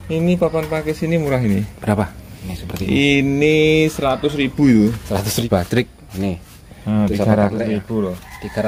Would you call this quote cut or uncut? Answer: cut